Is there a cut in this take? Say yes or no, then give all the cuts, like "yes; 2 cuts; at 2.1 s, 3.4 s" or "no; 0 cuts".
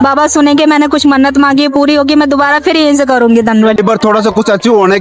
yes; 1 cut; at 3.8 s